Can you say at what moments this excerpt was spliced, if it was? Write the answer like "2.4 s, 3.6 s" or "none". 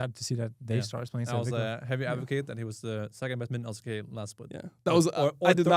none